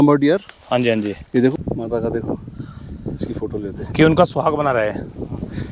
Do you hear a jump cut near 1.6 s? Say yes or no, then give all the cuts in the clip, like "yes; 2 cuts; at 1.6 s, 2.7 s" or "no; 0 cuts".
yes; 1 cut; at 1.6 s